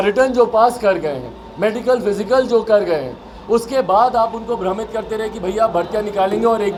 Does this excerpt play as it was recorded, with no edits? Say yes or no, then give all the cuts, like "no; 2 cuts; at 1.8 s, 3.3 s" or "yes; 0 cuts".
yes; 0 cuts